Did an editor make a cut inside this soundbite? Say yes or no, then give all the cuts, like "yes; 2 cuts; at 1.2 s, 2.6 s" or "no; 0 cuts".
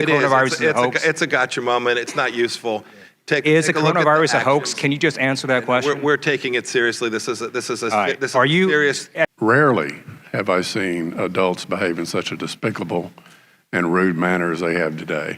yes; 1 cut; at 9.3 s